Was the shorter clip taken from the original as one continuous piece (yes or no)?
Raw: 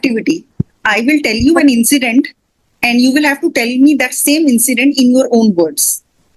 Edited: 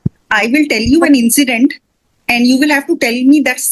yes